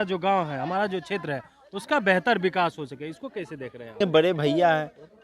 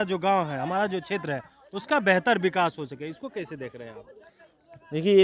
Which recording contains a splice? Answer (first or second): first